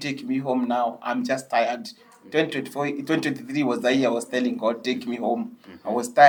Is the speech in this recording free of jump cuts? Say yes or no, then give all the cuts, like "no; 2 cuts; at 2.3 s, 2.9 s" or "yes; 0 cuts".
yes; 0 cuts